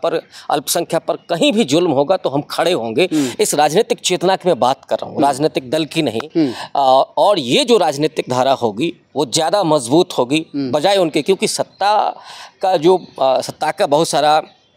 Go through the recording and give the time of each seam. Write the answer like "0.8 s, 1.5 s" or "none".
none